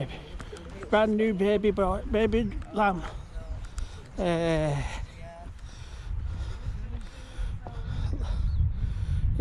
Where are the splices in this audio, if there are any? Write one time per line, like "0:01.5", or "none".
none